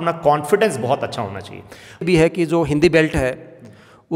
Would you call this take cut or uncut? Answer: cut